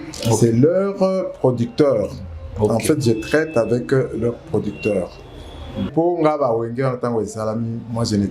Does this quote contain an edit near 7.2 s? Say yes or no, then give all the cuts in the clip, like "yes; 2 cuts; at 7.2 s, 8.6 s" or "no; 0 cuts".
no; 1 cut; at 5.9 s